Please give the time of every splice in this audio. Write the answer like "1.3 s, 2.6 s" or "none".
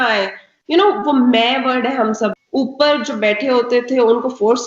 2.3 s